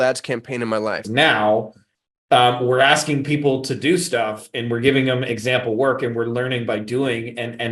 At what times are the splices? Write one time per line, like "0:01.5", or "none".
0:01.1